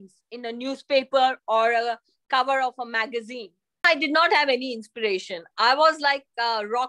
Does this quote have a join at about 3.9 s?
yes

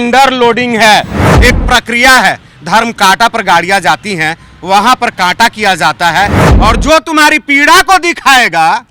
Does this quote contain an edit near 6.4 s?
yes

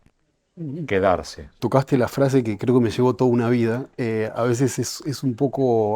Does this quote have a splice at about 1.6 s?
yes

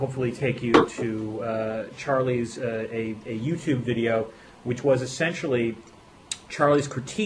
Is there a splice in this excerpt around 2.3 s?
yes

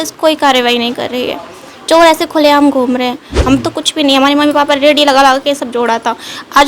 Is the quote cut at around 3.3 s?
yes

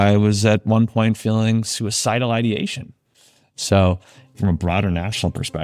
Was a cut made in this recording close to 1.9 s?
no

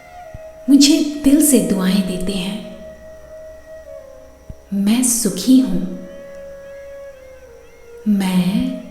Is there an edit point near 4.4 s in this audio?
yes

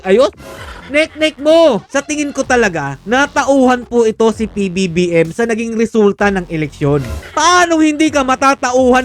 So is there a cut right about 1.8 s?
yes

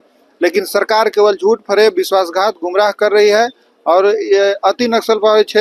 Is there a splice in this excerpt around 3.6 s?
no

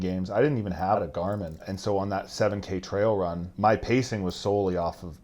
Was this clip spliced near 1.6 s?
yes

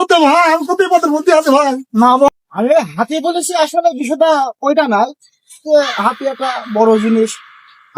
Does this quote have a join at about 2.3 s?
yes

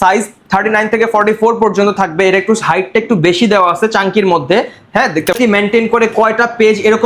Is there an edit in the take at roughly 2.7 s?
no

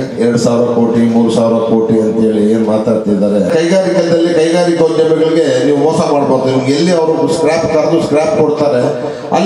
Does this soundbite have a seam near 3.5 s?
yes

